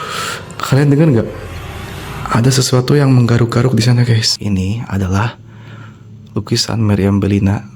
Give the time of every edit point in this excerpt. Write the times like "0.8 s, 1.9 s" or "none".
4.3 s